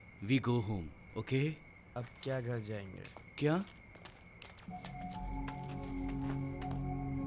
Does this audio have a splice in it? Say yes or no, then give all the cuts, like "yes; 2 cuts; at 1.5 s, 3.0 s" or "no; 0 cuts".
no; 0 cuts